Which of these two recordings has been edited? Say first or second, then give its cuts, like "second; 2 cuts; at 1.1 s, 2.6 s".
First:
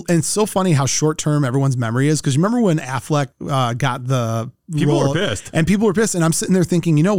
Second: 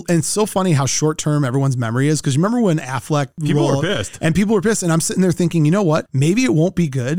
second; 1 cut; at 3.3 s